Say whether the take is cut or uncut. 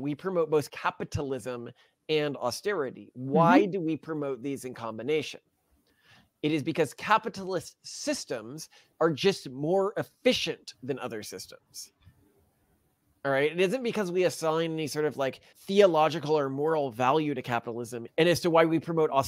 cut